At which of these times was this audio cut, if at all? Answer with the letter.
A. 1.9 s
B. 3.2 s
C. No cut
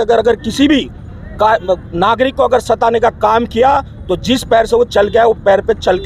C